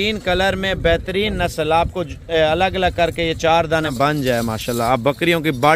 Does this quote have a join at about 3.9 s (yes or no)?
yes